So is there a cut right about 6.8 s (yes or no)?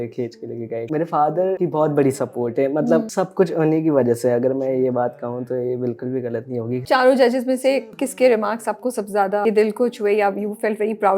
yes